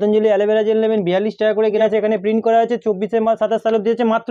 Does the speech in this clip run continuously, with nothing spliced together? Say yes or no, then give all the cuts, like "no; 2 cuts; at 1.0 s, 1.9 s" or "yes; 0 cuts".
no; 1 cut; at 1.8 s